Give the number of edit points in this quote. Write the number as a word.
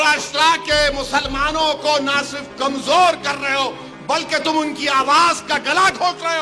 zero